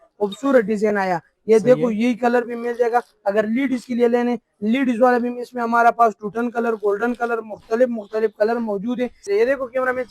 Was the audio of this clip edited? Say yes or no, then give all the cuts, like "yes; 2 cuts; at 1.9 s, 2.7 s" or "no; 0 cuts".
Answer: yes; 1 cut; at 9.2 s